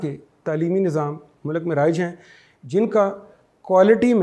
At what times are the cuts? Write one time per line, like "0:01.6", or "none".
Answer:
0:01.3